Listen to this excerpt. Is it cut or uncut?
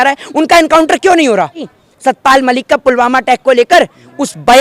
cut